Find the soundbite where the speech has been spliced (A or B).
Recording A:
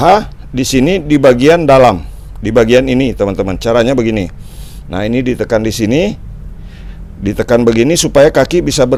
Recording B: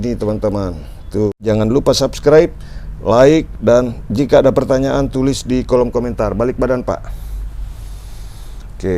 B